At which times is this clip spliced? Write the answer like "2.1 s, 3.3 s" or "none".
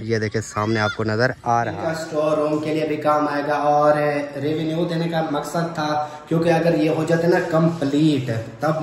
1.7 s